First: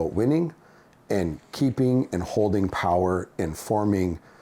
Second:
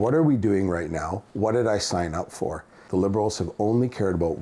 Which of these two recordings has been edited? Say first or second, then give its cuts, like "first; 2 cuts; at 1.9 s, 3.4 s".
second; 1 cut; at 2.8 s